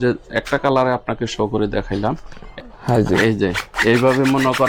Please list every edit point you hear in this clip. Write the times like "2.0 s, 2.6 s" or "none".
2.5 s